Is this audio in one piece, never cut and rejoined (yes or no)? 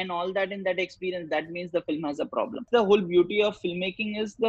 no